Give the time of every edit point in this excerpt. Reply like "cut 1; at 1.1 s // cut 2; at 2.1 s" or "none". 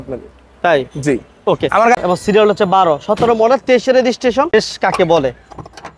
cut 1; at 2.0 s // cut 2; at 4.5 s